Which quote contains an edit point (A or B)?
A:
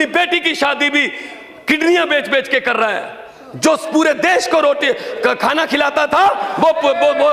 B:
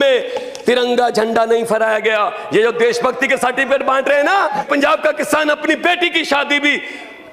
B